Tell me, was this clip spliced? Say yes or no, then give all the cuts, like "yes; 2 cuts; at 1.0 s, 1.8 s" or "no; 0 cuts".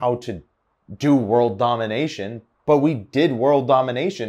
no; 0 cuts